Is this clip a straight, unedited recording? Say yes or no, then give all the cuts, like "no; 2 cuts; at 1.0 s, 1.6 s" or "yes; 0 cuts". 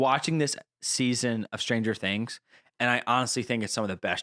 yes; 0 cuts